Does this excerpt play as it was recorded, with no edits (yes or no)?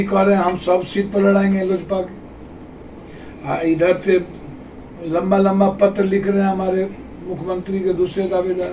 yes